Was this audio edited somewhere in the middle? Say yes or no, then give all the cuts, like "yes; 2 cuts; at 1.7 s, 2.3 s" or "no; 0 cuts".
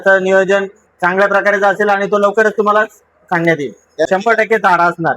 yes; 1 cut; at 4.1 s